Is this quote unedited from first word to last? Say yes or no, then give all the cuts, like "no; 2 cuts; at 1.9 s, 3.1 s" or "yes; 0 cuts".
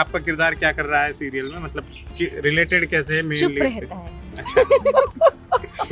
yes; 0 cuts